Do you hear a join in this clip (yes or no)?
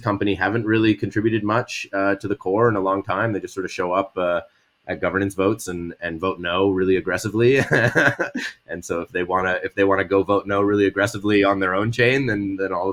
no